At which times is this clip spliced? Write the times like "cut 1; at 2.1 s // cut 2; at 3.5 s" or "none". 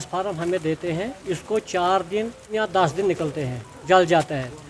cut 1; at 2.5 s